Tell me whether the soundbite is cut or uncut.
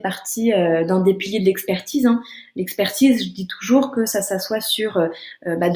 uncut